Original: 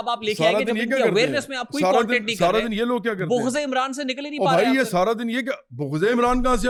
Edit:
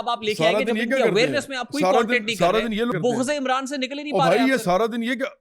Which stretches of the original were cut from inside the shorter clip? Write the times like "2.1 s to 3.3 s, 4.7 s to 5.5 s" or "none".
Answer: 2.9 s to 3.2 s